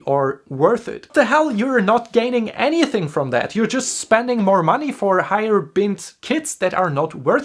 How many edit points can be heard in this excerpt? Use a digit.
1